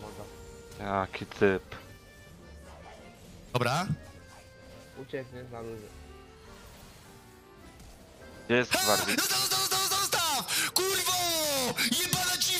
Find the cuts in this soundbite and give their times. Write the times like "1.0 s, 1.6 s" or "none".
none